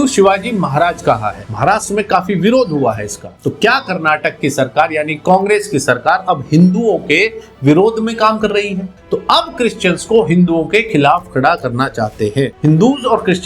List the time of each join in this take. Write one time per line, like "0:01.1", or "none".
0:03.3
0:08.9
0:12.5